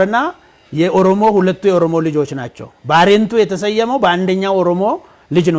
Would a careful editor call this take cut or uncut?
uncut